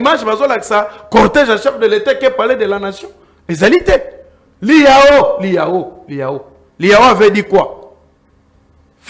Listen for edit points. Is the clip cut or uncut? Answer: uncut